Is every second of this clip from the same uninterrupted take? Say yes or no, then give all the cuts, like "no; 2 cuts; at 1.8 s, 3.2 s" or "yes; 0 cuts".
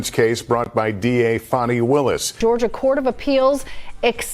yes; 0 cuts